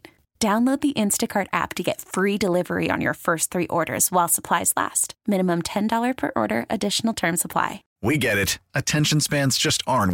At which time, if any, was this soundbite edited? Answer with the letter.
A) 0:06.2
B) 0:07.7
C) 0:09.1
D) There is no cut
B